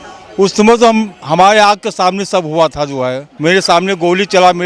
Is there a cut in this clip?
yes; 1 cut; at 3.3 s

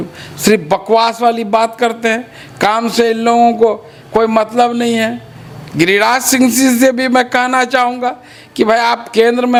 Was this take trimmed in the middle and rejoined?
no; 0 cuts

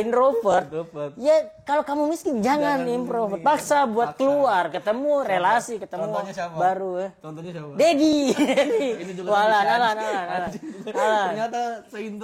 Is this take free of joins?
yes; 0 cuts

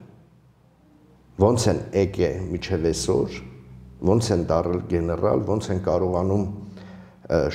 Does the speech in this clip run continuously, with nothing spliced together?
yes; 0 cuts

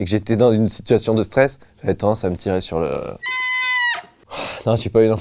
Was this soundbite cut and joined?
no; 0 cuts

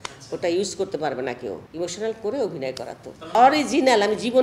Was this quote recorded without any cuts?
no; 2 cuts; at 1.6 s, 3.4 s

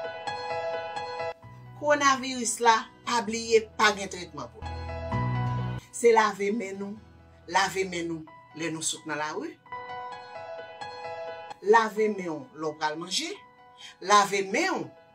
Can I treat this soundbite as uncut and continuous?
yes; 0 cuts

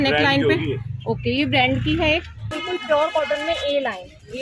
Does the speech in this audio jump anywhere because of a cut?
yes; 1 cut; at 2.5 s

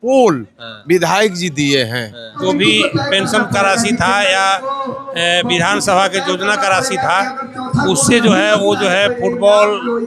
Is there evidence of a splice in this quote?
yes; 1 cut; at 2.4 s

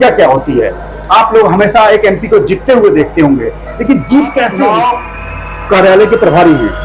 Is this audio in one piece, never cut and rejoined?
no; 1 cut; at 4.6 s

